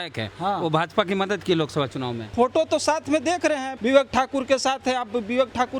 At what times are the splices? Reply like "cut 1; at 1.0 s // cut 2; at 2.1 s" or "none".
cut 1; at 2.3 s // cut 2; at 3.7 s